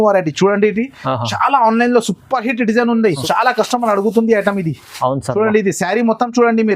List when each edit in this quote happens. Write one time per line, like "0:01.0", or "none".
0:03.2